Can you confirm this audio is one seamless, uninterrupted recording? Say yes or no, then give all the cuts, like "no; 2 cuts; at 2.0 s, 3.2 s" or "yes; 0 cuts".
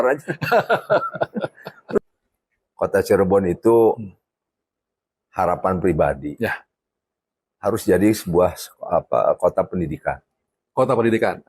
no; 1 cut; at 2.0 s